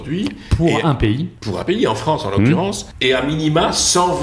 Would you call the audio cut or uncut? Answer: cut